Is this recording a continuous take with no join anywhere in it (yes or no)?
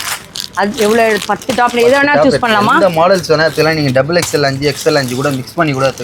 yes